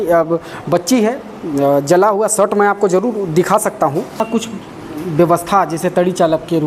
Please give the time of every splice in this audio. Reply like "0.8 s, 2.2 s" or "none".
4.2 s